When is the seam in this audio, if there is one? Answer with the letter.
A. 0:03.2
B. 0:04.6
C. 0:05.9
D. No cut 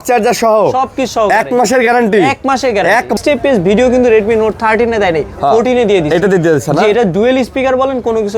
A